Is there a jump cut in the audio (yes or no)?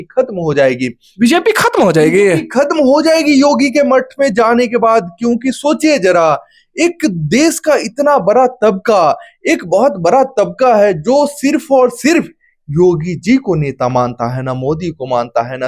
no